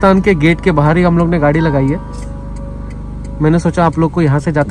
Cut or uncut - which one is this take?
uncut